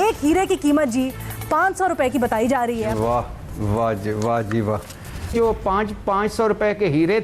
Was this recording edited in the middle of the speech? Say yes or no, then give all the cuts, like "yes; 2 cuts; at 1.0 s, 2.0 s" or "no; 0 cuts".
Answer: yes; 2 cuts; at 2.9 s, 5.3 s